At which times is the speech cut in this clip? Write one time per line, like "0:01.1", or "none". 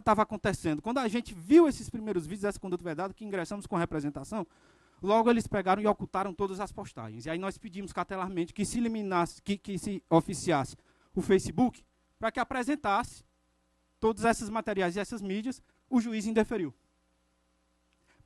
0:01.7
0:05.5